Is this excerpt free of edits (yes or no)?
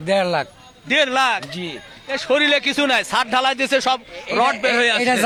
yes